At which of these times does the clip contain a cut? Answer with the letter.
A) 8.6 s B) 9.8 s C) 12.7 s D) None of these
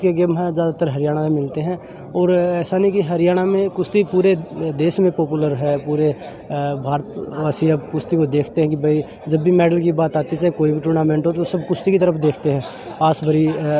D